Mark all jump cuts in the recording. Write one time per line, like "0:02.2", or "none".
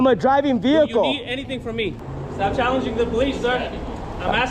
0:01.9